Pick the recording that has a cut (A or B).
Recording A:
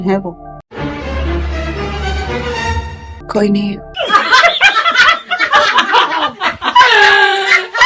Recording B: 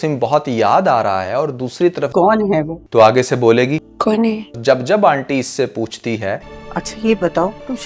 B